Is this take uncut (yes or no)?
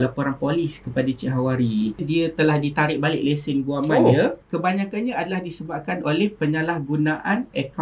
no